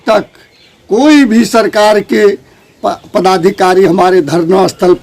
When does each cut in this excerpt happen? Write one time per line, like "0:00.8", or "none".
none